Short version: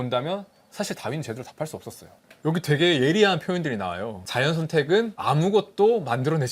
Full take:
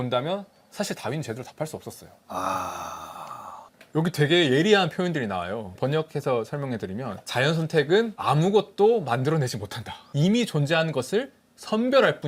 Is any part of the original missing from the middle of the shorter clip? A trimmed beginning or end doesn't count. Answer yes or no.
yes